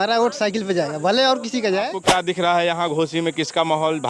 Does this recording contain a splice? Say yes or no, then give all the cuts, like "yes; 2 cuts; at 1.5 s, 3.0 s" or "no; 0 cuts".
yes; 1 cut; at 1.9 s